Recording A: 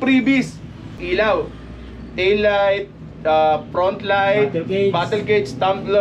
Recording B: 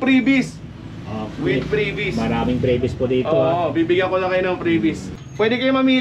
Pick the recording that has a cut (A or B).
A